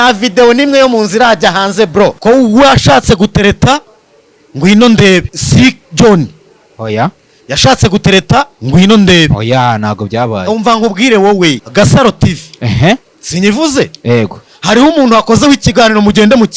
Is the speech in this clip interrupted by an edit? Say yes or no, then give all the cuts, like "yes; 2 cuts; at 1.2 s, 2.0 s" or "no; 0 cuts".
yes; 3 cuts; at 2.2 s, 5.4 s, 11.6 s